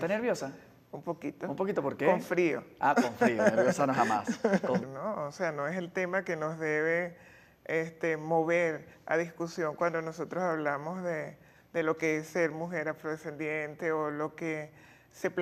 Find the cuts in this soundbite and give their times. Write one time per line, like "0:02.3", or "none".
none